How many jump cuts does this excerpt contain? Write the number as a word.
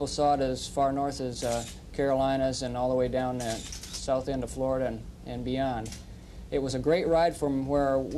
one